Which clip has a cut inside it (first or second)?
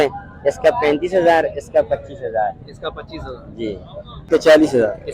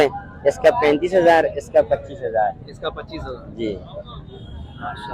first